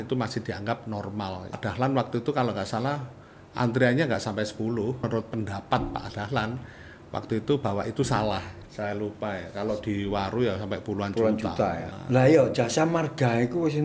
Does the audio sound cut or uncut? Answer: cut